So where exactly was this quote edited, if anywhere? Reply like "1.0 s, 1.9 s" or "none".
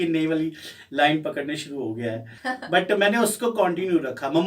2.3 s